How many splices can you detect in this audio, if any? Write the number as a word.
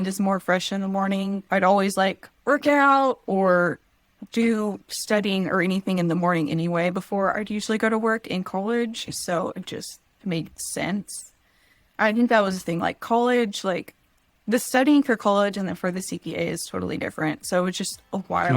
one